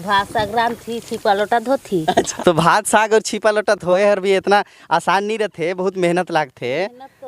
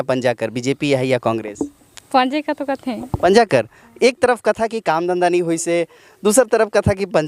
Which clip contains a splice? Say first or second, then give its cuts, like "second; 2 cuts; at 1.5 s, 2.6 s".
first; 2 cuts; at 2.3 s, 3.9 s